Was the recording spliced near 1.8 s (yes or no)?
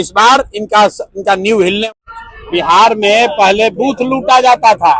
yes